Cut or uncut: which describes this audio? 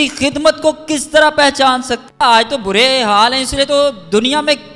cut